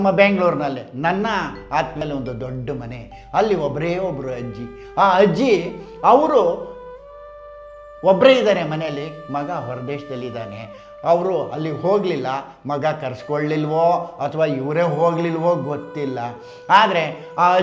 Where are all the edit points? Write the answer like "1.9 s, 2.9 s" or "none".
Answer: 1.9 s